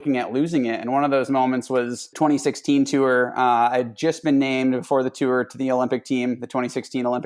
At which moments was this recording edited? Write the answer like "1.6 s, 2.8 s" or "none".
2.0 s